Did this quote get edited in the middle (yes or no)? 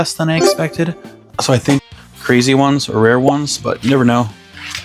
yes